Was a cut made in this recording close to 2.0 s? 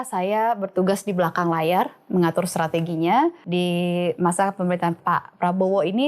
no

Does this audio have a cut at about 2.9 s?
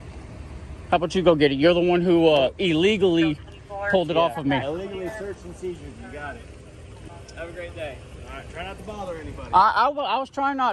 no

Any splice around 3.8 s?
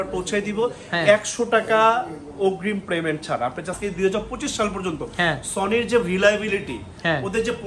yes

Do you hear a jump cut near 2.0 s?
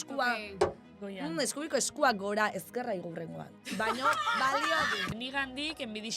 no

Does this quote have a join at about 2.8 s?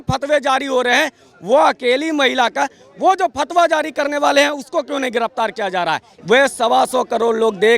no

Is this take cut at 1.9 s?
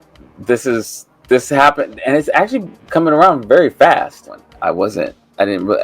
no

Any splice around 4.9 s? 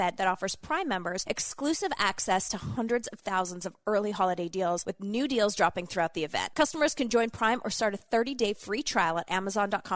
yes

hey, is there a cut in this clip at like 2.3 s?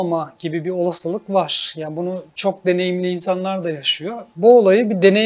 yes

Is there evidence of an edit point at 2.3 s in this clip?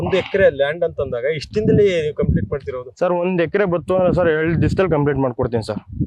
no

